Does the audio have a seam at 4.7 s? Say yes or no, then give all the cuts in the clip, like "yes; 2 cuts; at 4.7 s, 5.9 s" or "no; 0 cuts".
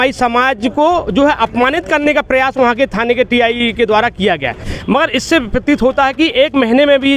yes; 1 cut; at 4.7 s